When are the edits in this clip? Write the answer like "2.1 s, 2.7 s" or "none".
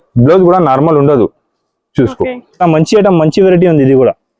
2.6 s